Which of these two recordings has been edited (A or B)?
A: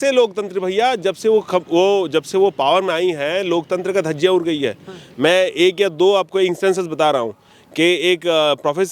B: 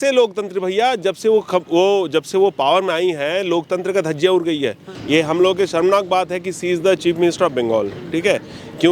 B